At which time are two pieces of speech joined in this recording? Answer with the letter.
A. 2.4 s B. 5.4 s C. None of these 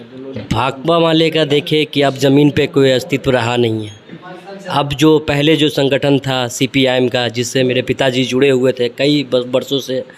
C